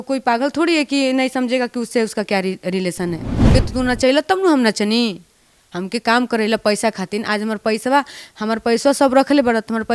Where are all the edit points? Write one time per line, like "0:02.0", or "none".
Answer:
0:03.5